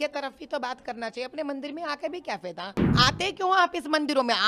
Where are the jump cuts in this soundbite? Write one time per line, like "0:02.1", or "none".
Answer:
0:02.9